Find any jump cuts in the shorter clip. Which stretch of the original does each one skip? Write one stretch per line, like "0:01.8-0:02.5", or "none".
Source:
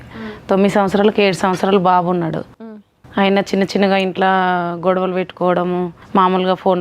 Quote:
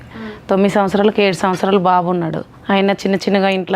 0:02.5-0:03.0